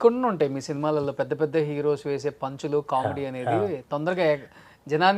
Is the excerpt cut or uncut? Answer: uncut